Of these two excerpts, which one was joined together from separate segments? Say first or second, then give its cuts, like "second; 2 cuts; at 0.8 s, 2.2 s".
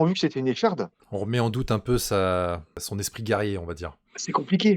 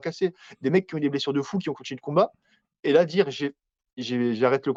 first; 2 cuts; at 1.0 s, 2.8 s